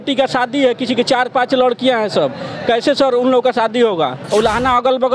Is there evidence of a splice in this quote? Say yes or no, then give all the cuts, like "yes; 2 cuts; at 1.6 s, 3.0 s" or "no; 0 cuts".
yes; 1 cut; at 4.2 s